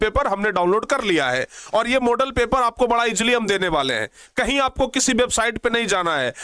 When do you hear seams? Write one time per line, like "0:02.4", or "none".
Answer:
none